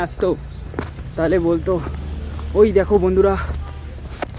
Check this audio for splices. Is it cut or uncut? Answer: uncut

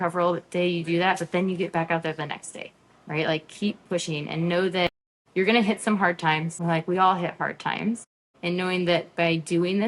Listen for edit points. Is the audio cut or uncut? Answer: cut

